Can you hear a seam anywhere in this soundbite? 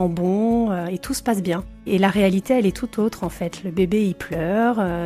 yes; 1 cut; at 1.8 s

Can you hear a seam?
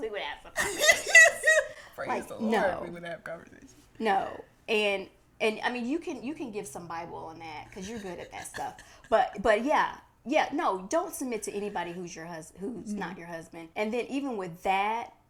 no; 0 cuts

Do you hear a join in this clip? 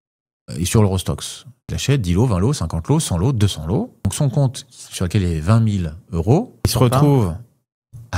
yes; 3 cuts; at 1.7 s, 4.1 s, 6.7 s

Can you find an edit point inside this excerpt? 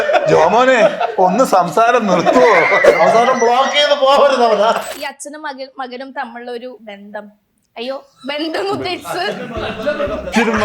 yes; 2 cuts; at 4.9 s, 6.8 s

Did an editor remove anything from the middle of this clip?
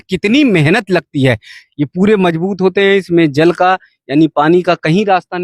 yes; 1 cut; at 1.6 s

